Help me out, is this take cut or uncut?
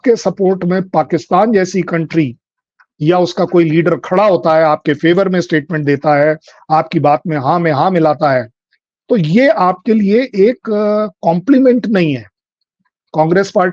uncut